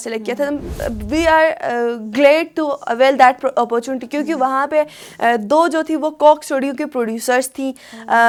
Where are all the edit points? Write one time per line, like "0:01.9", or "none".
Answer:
none